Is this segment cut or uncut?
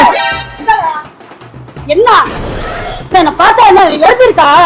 uncut